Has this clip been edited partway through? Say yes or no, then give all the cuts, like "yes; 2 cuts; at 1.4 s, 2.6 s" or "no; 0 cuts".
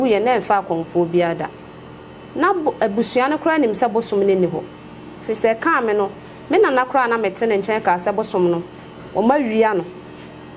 no; 0 cuts